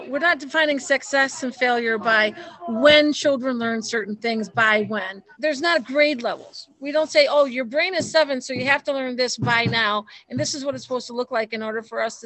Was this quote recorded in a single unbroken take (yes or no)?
no